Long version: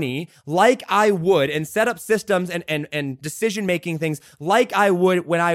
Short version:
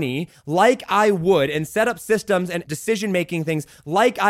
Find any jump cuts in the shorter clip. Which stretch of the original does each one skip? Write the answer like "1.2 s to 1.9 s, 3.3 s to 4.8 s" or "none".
2.6 s to 3.2 s